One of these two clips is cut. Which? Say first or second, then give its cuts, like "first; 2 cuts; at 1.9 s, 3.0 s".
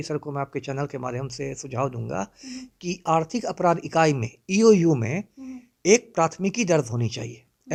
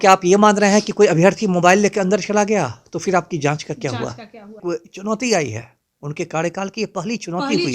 second; 1 cut; at 4.6 s